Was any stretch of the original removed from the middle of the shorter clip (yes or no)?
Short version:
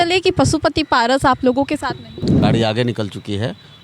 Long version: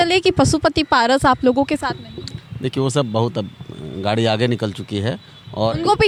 yes